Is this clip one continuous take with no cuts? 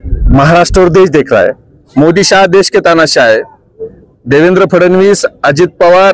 no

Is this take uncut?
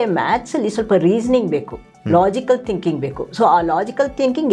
yes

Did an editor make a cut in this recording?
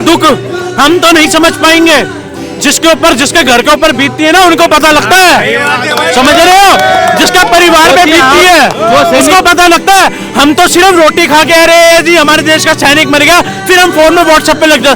no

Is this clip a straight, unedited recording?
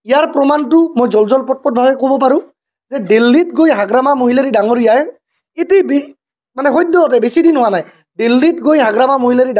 yes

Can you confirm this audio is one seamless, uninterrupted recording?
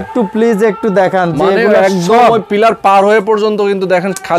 yes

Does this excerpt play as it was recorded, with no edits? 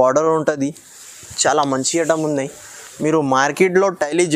yes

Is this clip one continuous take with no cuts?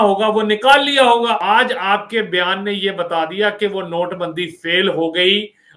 no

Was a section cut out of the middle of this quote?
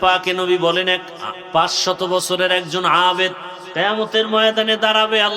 yes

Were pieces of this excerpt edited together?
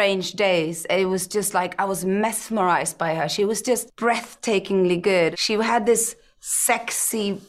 yes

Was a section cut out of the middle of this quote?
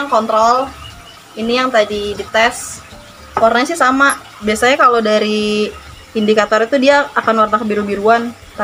no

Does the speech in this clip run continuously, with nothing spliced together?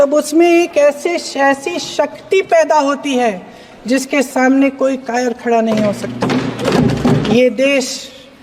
no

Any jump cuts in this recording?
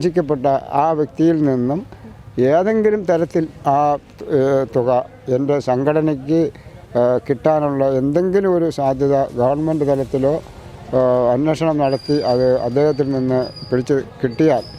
no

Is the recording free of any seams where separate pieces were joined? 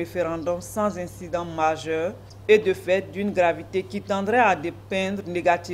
no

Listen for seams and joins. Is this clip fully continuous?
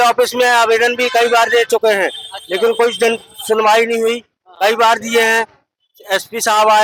yes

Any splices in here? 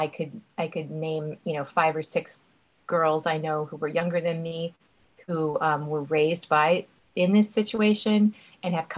no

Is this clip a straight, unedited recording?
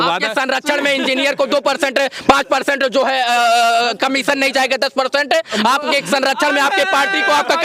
yes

